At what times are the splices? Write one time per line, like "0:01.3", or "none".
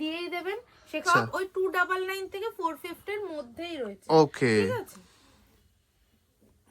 0:01.0